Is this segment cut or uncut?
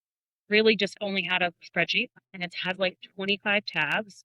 cut